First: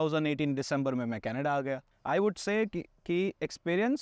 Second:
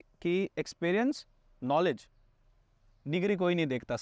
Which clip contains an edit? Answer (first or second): first